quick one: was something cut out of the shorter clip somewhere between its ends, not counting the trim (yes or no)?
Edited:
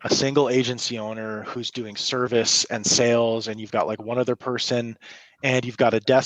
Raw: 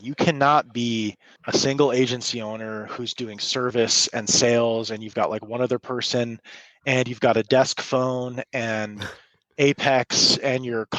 no